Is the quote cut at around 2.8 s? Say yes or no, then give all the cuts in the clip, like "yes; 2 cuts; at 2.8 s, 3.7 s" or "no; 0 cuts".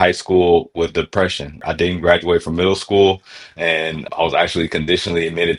no; 2 cuts; at 1.6 s, 4.1 s